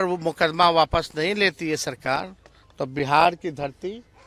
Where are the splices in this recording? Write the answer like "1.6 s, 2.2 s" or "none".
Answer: none